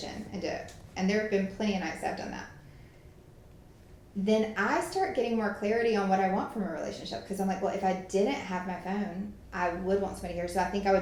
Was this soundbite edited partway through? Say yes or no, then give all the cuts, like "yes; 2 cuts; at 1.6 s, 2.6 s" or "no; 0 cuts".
no; 0 cuts